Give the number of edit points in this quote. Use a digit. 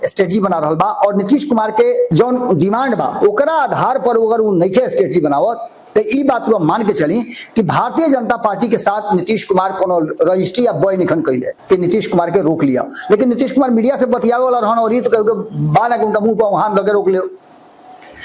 2